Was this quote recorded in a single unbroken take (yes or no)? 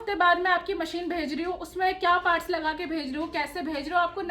yes